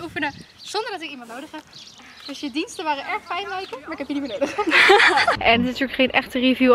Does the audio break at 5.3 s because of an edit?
yes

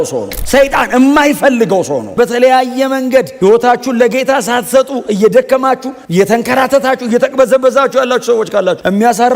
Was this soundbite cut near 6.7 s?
no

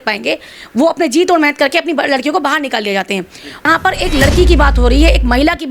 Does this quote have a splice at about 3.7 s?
yes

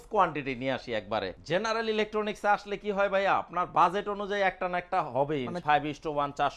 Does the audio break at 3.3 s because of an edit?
no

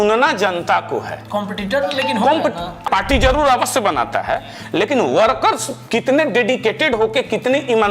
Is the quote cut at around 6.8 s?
no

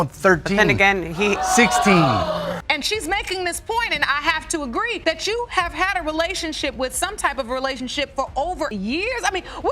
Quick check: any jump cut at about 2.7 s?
yes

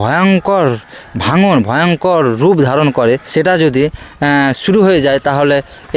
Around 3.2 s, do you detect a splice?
yes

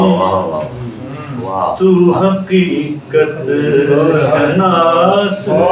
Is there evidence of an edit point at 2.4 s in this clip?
no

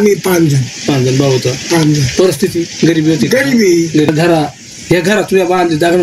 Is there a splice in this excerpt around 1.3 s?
no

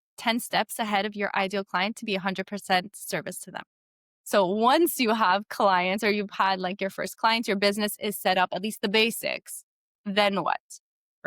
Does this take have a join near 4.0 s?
yes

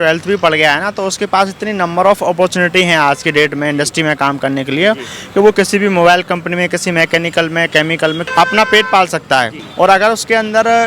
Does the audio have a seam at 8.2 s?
yes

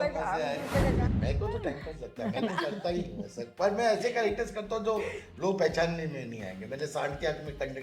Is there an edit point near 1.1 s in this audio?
yes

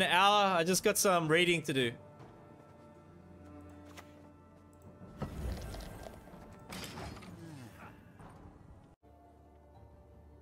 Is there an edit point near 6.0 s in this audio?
no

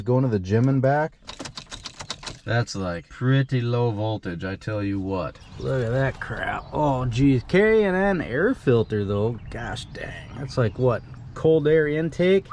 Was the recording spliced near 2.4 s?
no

